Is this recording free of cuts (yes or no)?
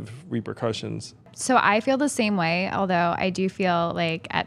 no